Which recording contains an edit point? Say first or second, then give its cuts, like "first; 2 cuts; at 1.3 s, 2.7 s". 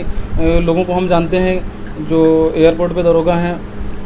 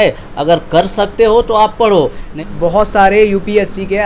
second; 1 cut; at 2.2 s